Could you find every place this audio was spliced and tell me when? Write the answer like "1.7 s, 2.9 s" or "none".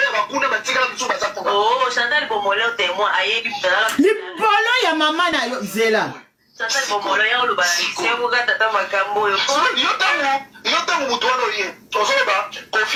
none